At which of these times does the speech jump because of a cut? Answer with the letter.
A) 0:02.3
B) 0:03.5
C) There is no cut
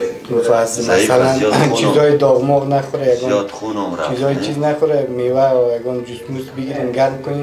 C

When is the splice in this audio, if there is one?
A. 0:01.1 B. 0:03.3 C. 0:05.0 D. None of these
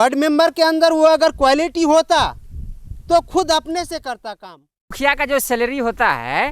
C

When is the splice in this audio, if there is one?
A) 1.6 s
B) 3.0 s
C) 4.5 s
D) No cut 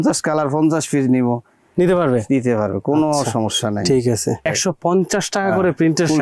C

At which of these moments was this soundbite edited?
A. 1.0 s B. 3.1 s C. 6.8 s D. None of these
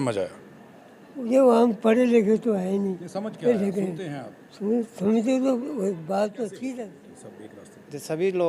C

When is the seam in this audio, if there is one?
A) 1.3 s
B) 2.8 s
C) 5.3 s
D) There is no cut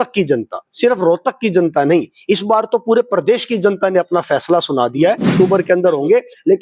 C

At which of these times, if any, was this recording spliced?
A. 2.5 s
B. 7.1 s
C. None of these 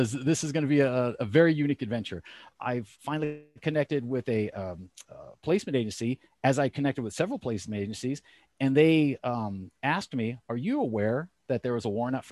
A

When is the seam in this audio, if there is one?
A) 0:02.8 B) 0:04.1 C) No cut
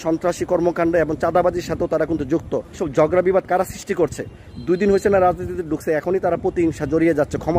A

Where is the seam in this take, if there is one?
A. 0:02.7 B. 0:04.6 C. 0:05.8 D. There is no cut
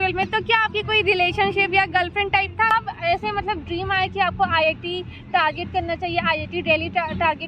A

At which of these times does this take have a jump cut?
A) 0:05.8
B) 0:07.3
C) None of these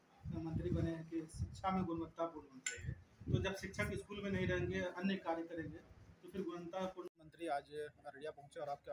B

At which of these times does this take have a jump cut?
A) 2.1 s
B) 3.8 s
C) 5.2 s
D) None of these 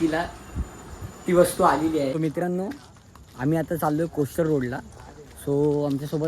A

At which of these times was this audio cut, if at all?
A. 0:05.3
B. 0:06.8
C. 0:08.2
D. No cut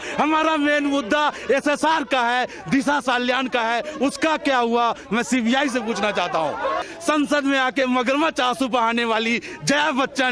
B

